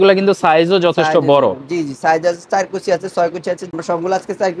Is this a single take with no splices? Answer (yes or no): no